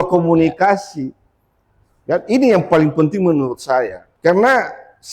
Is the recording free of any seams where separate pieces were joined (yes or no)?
no